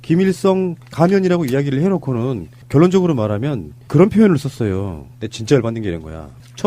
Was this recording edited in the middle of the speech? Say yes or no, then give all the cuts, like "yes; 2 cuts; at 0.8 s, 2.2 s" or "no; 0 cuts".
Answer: yes; 1 cut; at 2.9 s